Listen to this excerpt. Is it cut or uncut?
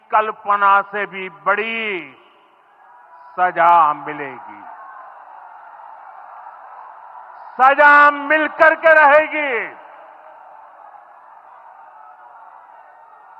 uncut